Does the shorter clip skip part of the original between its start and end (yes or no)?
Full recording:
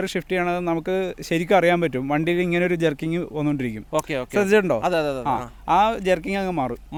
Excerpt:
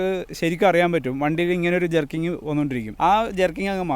yes